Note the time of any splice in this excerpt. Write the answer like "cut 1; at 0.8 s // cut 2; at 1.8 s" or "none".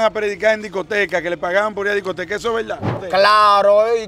cut 1; at 3.0 s